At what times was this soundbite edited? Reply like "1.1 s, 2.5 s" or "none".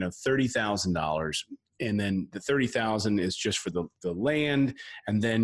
none